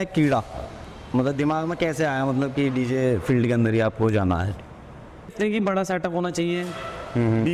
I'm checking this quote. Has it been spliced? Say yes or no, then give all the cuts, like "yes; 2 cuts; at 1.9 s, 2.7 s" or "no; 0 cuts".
yes; 1 cut; at 5.3 s